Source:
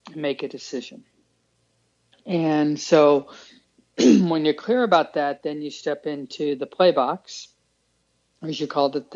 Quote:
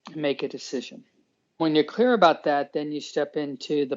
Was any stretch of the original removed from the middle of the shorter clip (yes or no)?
yes